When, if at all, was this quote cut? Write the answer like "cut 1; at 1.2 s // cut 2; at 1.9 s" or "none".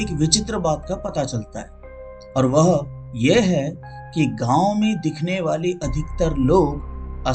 none